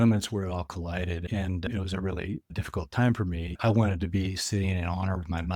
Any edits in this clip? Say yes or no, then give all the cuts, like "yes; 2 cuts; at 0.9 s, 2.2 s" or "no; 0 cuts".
yes; 3 cuts; at 1.5 s, 2.6 s, 3.6 s